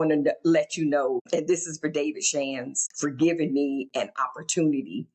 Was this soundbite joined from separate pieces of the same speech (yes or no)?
yes